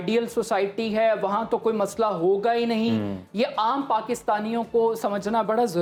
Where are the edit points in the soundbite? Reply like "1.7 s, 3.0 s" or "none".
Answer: none